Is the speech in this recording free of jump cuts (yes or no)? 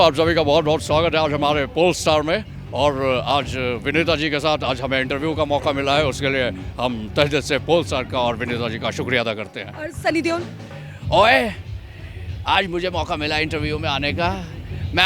yes